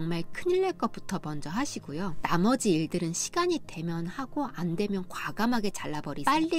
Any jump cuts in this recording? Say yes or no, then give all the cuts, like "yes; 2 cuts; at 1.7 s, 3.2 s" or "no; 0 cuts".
no; 0 cuts